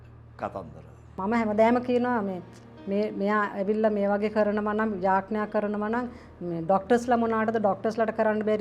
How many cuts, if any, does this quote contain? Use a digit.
1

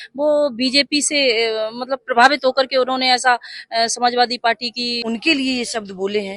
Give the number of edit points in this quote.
1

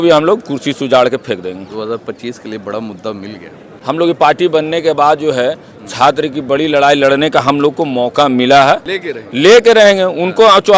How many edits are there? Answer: 2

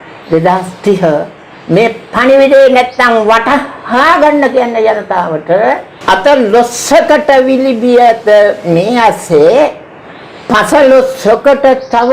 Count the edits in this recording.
1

